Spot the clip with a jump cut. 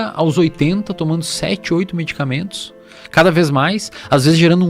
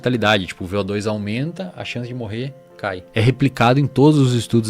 second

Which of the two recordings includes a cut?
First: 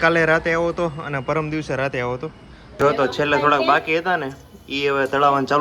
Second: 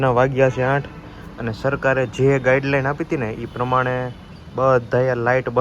first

